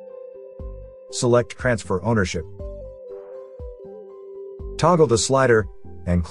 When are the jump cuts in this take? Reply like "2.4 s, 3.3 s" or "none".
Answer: 1.2 s, 2.6 s, 4.8 s